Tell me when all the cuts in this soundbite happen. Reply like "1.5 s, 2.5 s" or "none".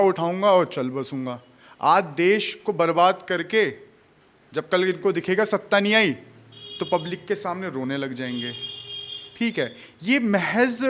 none